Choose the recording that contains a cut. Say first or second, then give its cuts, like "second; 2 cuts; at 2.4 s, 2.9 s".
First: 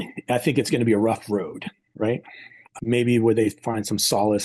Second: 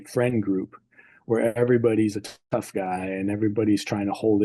first; 1 cut; at 2.6 s